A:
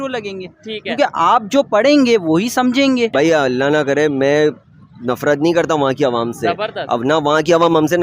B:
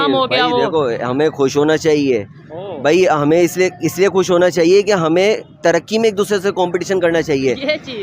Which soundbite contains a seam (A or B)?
A